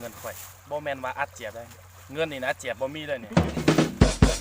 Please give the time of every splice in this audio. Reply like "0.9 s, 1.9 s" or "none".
3.3 s